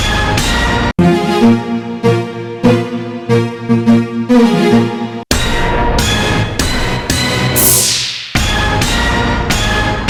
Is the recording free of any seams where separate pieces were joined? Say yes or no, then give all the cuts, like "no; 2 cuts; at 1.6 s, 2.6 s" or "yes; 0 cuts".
yes; 0 cuts